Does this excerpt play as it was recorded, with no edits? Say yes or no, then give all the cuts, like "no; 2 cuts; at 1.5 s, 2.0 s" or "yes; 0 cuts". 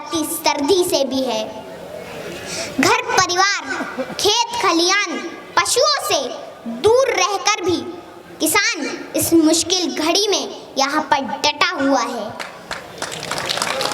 yes; 0 cuts